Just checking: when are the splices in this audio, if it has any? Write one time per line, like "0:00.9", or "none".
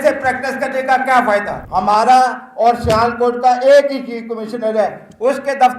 0:01.6